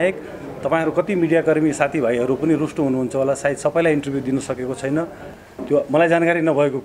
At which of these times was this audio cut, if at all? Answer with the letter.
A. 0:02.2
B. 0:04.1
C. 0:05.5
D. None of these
C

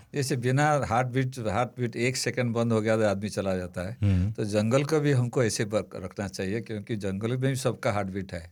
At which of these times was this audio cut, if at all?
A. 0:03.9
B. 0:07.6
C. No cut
C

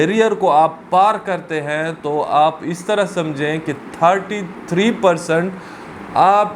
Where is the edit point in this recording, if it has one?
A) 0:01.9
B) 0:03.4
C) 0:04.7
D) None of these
D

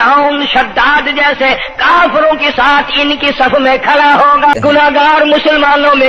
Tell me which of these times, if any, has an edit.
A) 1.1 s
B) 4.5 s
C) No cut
B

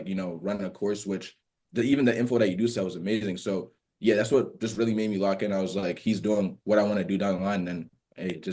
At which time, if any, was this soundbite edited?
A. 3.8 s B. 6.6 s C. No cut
C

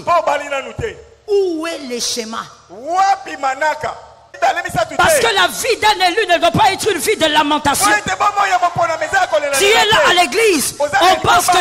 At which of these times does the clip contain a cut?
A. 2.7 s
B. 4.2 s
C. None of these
B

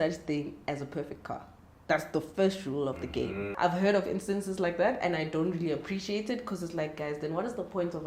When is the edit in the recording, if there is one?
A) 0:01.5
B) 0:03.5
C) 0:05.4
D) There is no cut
B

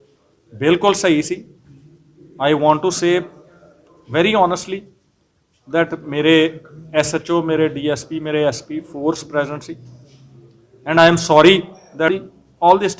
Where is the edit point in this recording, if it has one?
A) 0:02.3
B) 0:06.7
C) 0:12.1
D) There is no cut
C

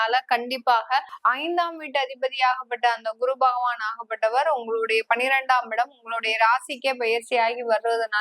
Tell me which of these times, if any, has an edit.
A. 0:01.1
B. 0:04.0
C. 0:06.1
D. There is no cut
A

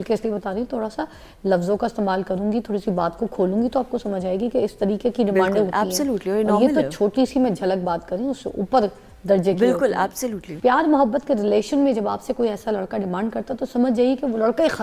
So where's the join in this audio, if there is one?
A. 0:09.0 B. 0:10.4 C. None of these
B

